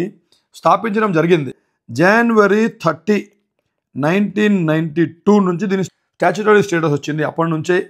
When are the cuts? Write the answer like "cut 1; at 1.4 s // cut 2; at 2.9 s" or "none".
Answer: cut 1; at 1.5 s // cut 2; at 5.9 s